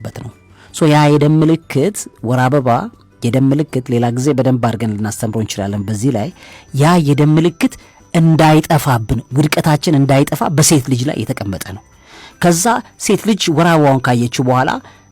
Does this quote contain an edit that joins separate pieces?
no; 0 cuts

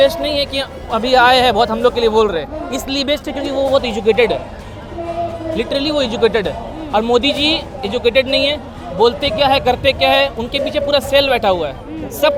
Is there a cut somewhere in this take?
no; 0 cuts

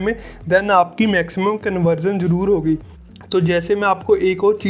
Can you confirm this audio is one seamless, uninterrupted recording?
yes; 0 cuts

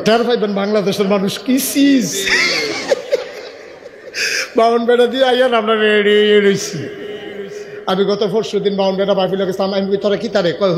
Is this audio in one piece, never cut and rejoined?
yes; 0 cuts

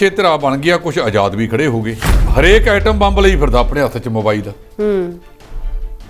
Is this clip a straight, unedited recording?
no; 1 cut; at 2.0 s

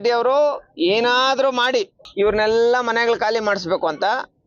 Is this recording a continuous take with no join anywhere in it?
no; 1 cut; at 2.0 s

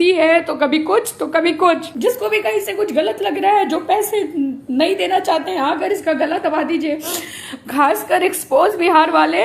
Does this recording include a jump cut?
yes; 1 cut; at 1.9 s

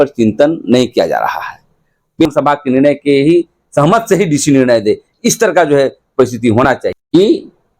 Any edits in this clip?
yes; 2 cuts; at 2.2 s, 6.9 s

